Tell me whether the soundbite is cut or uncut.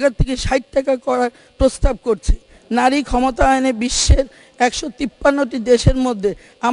cut